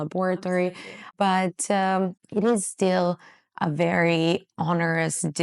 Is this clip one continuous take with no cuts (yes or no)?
no